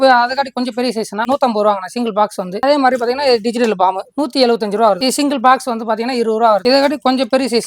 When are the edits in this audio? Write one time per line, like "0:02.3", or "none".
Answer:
0:01.2
0:02.5
0:05.0